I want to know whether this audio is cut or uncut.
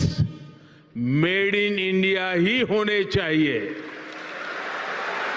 uncut